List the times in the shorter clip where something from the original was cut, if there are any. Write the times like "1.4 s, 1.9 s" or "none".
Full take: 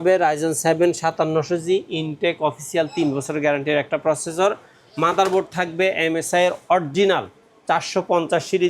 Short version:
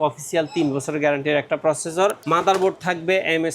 2.2 s

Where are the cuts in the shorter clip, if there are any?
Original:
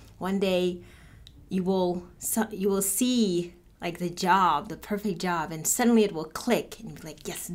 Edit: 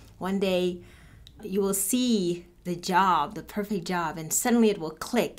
1.4 s, 2.6 s

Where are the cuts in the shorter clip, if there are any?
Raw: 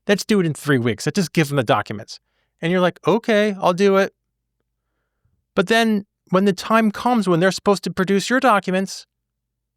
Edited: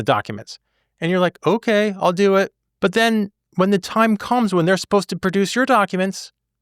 2.6 s

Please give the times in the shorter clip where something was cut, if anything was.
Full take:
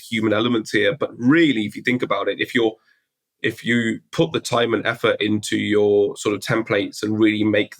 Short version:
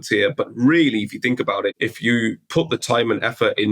1.8 s

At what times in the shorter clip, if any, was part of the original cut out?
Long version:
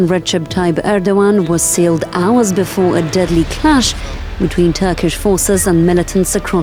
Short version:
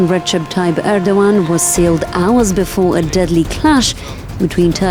none

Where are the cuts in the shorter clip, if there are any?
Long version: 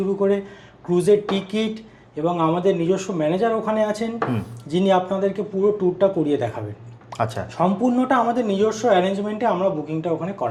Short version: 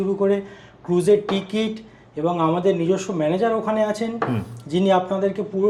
none

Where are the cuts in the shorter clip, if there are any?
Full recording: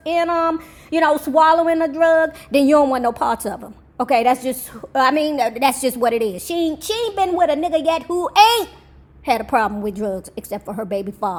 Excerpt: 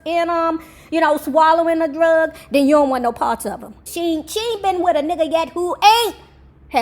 3.9 s

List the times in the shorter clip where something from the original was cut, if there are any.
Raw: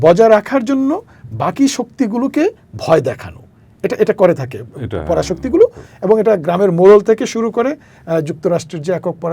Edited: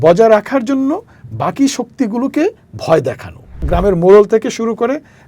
3.7 s

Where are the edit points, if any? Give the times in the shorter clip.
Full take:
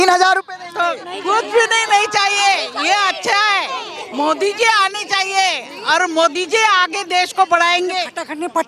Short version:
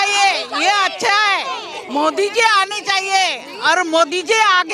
none

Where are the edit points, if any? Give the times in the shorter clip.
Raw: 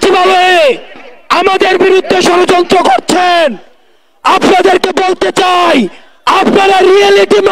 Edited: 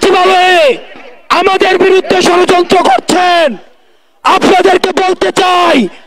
none

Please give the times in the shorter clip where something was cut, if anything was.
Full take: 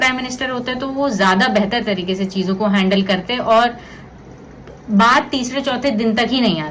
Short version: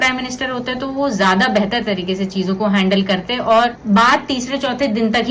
3.8 s

